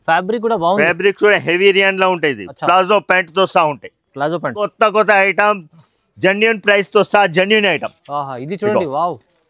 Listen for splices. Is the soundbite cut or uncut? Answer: cut